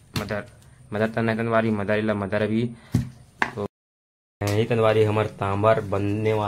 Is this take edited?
yes; 1 cut; at 3.7 s

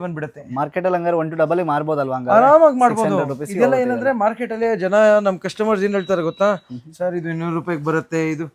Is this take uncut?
yes; 0 cuts

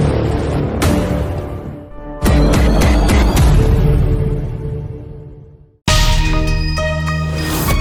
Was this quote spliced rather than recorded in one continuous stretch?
no; 0 cuts

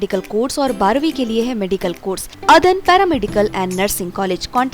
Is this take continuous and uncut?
no; 1 cut; at 2.3 s

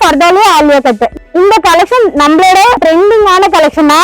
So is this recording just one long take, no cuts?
no; 2 cuts; at 1.1 s, 2.8 s

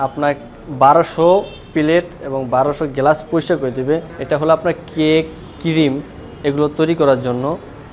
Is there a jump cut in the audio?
yes; 1 cut; at 4.1 s

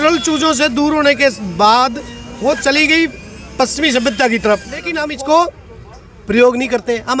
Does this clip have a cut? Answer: yes; 1 cut; at 5.0 s

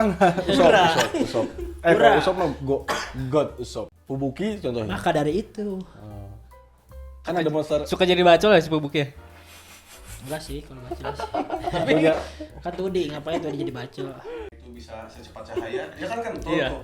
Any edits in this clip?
yes; 2 cuts; at 3.9 s, 14.5 s

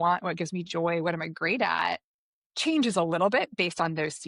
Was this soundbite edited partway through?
no; 0 cuts

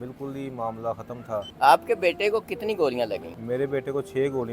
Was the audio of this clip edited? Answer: yes; 2 cuts; at 1.5 s, 3.3 s

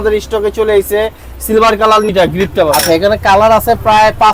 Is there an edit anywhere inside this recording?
yes; 1 cut; at 2.1 s

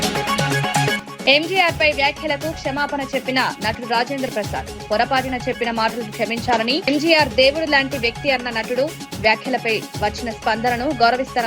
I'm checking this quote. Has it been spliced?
no; 0 cuts

